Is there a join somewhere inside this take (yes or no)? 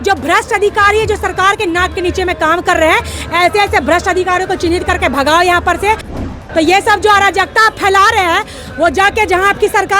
yes